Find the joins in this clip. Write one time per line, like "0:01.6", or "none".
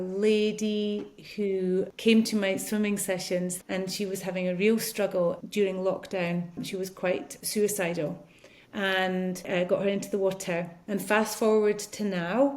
0:01.9
0:03.6
0:05.4
0:07.1
0:09.5
0:10.8

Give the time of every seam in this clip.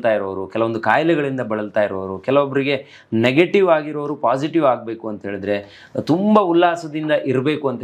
none

